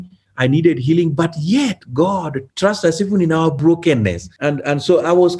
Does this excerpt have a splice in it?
yes; 3 cuts; at 2.4 s, 3.6 s, 4.3 s

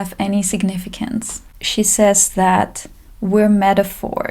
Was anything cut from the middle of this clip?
yes; 1 cut; at 1.5 s

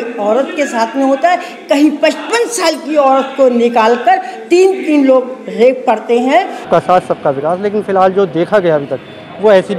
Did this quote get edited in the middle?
yes; 1 cut; at 6.7 s

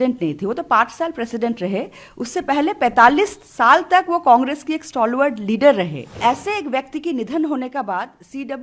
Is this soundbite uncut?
no; 1 cut; at 6.0 s

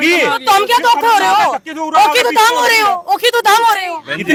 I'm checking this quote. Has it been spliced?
no; 0 cuts

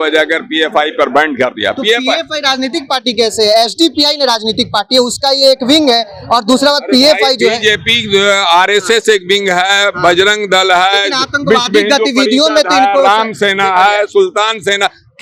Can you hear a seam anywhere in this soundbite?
no; 0 cuts

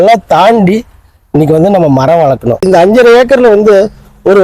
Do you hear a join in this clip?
yes; 1 cut; at 2.6 s

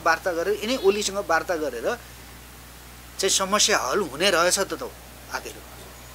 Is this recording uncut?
yes; 0 cuts

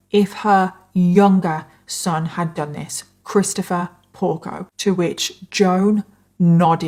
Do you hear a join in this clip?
no; 0 cuts

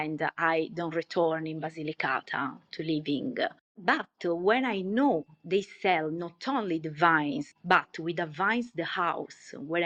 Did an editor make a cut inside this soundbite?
no; 0 cuts

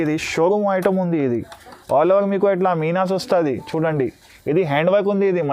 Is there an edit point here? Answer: no; 0 cuts

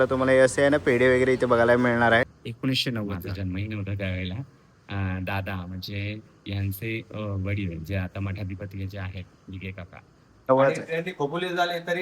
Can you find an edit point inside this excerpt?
yes; 2 cuts; at 2.4 s, 10.5 s

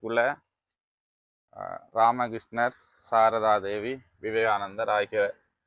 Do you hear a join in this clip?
no; 0 cuts

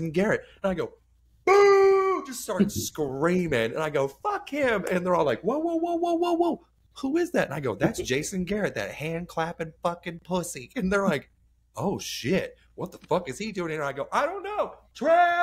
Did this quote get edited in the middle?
no; 0 cuts

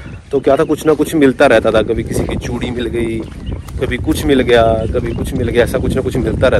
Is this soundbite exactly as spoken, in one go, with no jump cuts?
yes; 0 cuts

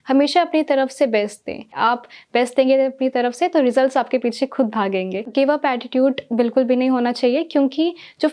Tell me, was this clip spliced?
yes; 2 cuts; at 1.8 s, 5.3 s

